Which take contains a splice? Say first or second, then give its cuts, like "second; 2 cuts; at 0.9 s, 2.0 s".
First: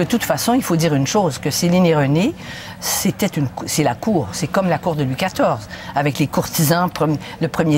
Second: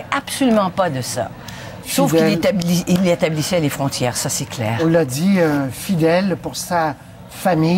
second; 1 cut; at 2.2 s